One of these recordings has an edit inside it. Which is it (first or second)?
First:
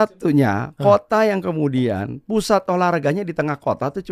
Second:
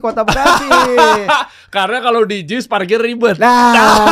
second